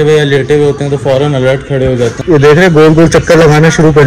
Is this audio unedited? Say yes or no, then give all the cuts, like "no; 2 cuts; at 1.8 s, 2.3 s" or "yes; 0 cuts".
no; 1 cut; at 2.2 s